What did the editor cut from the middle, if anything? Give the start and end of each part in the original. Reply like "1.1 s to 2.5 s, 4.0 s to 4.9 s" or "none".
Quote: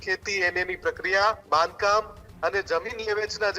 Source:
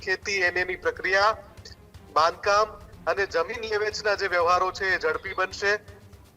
1.4 s to 2.1 s